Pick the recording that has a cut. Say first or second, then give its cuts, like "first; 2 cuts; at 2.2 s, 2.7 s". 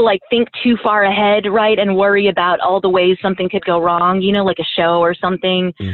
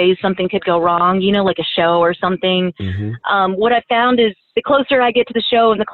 second; 1 cut; at 4.5 s